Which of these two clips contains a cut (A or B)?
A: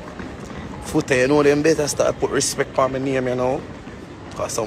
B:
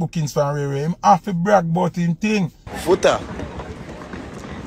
B